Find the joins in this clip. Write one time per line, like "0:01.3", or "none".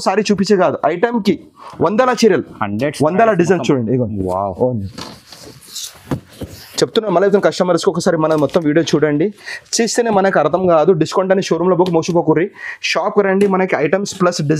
none